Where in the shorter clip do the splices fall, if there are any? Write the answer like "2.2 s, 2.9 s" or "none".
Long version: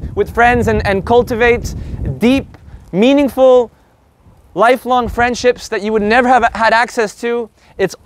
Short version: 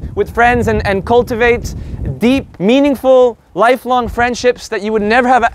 2.5 s, 3.4 s